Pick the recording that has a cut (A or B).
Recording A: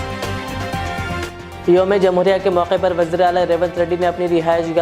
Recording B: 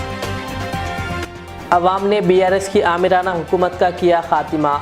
B